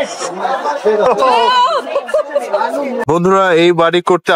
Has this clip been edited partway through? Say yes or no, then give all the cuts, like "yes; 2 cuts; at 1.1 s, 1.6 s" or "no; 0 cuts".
yes; 1 cut; at 3.1 s